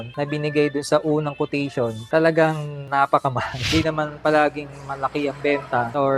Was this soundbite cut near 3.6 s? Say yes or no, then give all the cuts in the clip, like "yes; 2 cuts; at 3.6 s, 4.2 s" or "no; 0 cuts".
yes; 1 cut; at 3.6 s